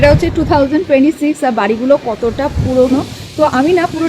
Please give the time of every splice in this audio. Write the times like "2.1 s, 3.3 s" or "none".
none